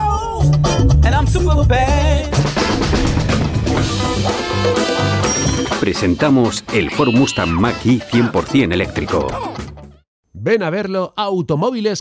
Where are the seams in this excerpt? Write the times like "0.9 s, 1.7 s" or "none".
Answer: none

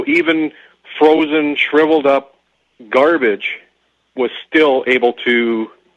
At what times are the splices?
none

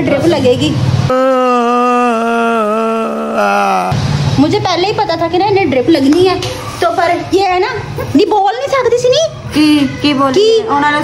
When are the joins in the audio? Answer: none

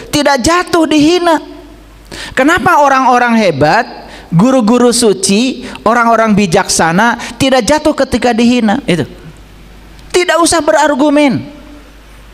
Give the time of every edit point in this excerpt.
8.8 s

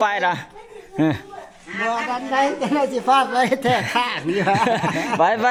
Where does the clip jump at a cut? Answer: none

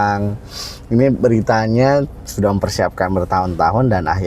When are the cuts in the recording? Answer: none

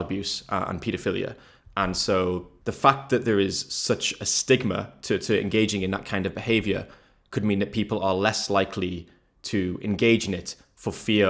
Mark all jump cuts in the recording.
2.5 s

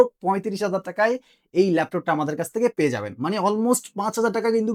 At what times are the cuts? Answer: none

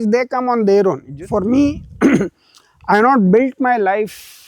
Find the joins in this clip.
1.1 s

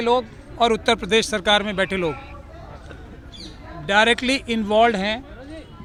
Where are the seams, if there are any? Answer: none

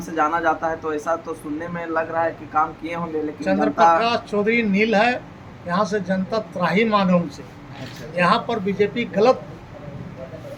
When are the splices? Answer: none

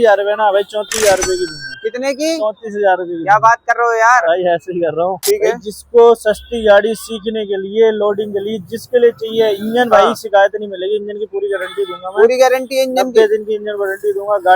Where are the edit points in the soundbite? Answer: 5.2 s

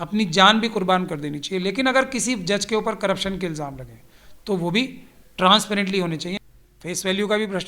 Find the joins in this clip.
6.3 s

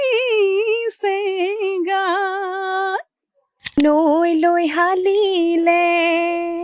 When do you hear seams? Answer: 3.8 s

